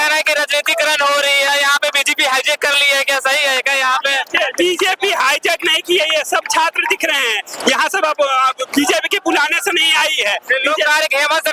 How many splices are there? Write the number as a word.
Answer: zero